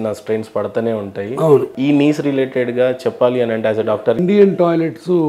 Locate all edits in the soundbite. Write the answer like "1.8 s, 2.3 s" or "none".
1.7 s, 4.2 s